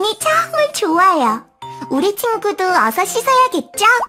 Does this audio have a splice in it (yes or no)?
no